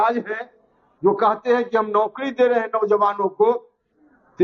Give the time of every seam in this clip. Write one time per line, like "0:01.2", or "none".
none